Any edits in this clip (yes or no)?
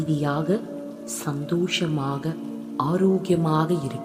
no